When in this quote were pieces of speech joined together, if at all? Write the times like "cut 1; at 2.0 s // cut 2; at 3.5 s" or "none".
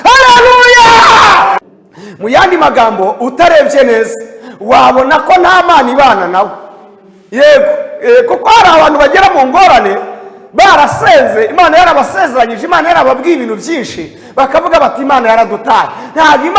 cut 1; at 1.6 s